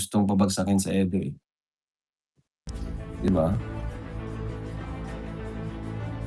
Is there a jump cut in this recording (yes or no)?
yes